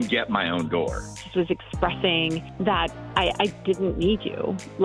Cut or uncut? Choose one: cut